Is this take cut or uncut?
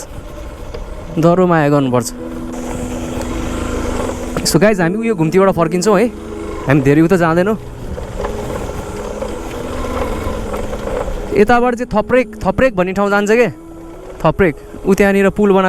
cut